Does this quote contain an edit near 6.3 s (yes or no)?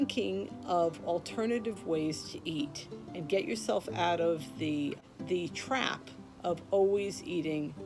no